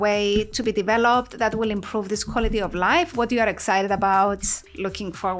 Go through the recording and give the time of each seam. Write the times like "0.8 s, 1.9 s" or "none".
none